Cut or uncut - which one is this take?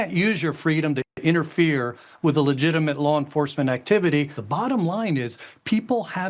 cut